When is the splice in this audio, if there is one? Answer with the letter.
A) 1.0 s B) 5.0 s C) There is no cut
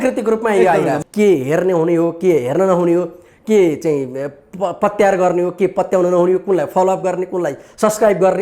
A